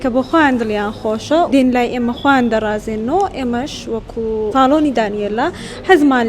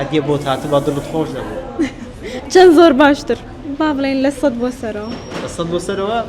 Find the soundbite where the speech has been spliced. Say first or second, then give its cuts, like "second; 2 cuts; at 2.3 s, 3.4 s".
first; 2 cuts; at 1.5 s, 4.5 s